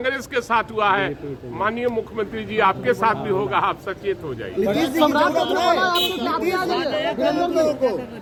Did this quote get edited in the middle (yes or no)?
no